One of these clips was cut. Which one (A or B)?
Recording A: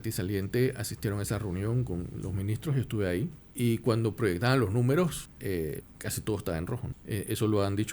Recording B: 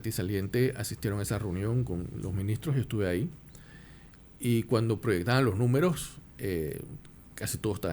A